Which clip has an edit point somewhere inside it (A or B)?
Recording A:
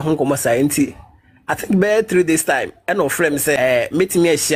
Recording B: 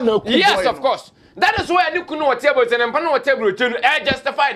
A